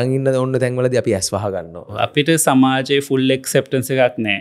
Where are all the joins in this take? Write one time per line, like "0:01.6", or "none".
0:01.8